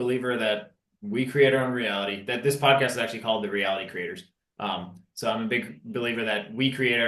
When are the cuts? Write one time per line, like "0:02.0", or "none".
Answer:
none